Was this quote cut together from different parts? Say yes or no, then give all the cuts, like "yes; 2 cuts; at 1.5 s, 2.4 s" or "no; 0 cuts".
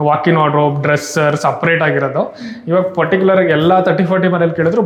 no; 0 cuts